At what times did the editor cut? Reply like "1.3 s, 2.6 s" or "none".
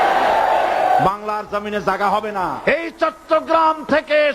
2.6 s